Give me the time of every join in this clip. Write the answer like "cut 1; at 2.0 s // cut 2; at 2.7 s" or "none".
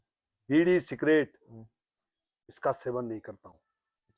none